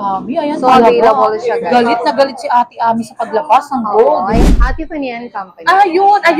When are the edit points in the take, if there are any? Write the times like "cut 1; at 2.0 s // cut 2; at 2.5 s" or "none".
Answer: cut 1; at 4.3 s